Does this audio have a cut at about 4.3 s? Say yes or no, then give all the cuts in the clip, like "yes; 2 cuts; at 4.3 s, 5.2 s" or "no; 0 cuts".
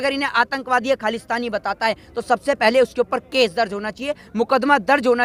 no; 0 cuts